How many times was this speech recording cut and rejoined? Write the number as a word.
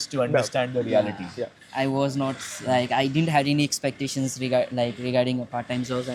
zero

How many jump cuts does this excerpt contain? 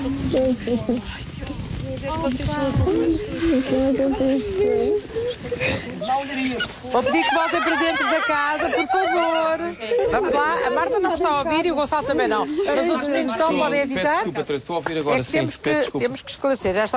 one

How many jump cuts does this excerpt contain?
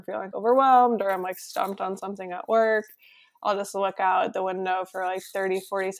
zero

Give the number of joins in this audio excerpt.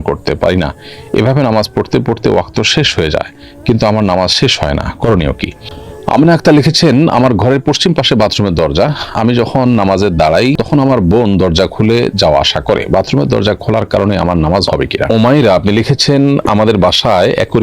two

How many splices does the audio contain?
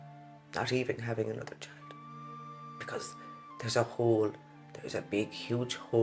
zero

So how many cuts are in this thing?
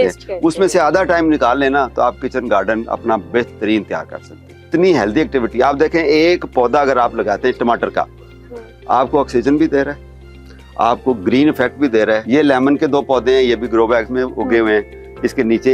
two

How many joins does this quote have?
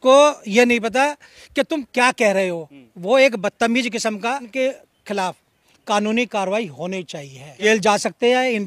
two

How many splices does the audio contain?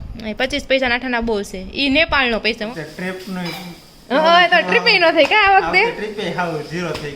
one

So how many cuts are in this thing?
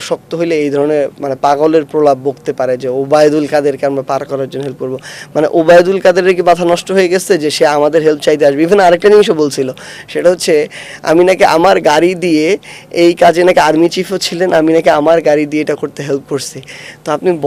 zero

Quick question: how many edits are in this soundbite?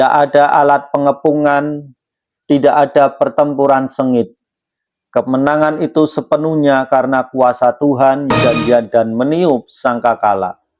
one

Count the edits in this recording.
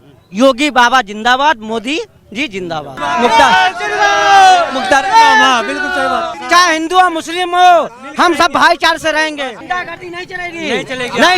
three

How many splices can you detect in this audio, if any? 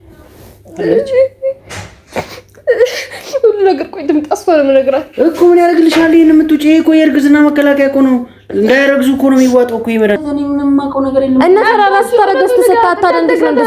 one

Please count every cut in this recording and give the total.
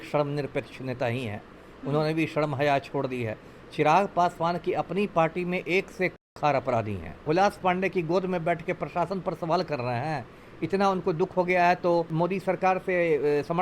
two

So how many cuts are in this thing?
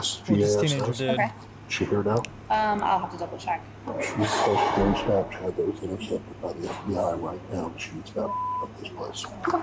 one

